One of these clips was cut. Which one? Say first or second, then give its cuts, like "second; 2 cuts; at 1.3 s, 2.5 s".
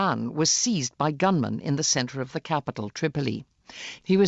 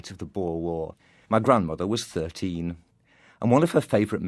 first; 1 cut; at 1.6 s